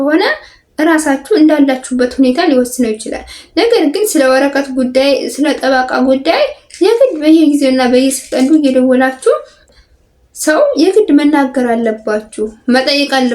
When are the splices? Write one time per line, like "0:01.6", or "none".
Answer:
0:09.7

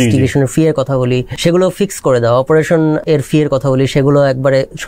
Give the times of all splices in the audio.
0:01.3
0:03.0

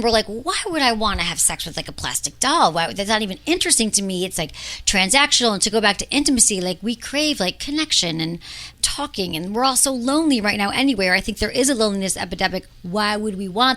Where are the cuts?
none

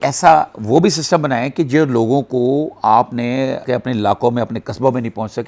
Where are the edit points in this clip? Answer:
0:03.6

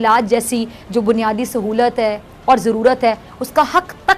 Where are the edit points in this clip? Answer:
none

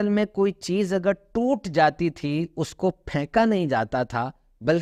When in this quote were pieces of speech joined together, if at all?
none

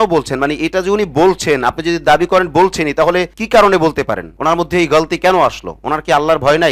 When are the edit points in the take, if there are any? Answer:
none

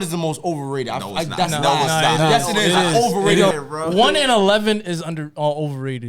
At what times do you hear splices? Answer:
0:03.5

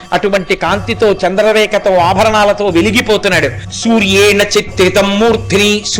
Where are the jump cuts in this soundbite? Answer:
0:03.7

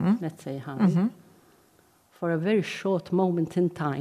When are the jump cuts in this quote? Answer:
none

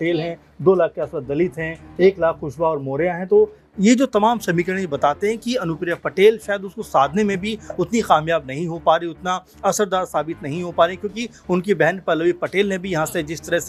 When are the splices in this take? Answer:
none

